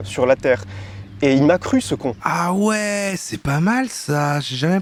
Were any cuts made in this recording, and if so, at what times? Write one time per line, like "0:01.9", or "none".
none